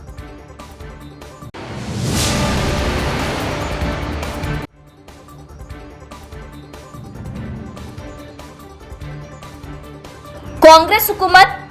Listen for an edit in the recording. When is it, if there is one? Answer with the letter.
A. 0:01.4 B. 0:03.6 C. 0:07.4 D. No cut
D